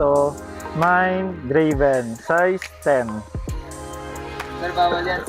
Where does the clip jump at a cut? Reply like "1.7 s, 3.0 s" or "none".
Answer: none